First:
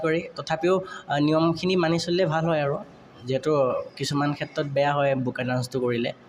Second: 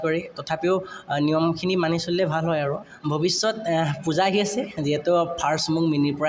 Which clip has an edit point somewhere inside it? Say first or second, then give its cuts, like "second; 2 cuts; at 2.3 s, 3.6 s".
second; 1 cut; at 2.9 s